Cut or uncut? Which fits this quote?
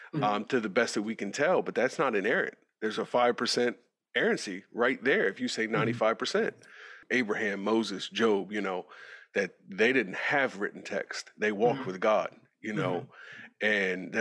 cut